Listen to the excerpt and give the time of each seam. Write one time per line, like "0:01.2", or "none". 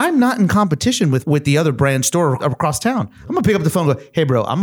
0:01.2
0:02.4